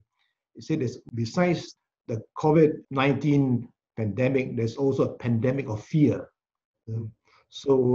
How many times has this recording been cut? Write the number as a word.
three